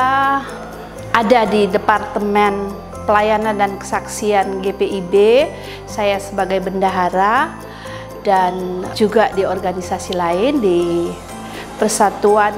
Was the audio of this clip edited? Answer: no; 0 cuts

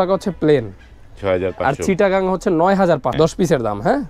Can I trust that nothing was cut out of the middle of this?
no; 1 cut; at 3.1 s

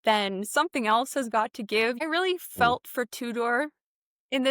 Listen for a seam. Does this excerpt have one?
yes; 1 cut; at 2.0 s

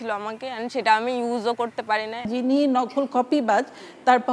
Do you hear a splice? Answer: yes; 1 cut; at 2.3 s

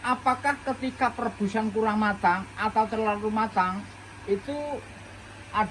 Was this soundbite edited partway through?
no; 0 cuts

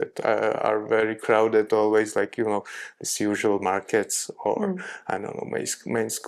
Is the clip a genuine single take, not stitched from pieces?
yes; 0 cuts

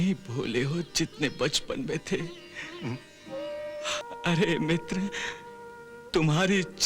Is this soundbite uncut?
no; 1 cut; at 4.0 s

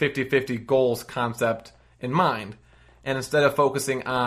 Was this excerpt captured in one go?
yes; 0 cuts

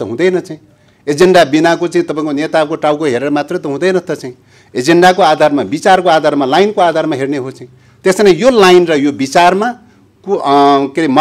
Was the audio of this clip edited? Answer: no; 0 cuts

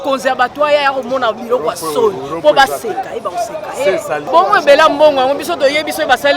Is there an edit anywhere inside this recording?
yes; 1 cut; at 4.2 s

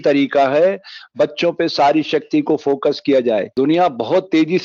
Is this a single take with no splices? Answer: no; 1 cut; at 3.5 s

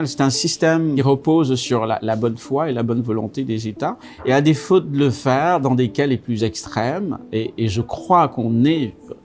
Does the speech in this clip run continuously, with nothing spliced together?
no; 2 cuts; at 1.0 s, 4.1 s

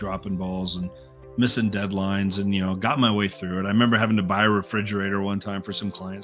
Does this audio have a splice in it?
no; 0 cuts

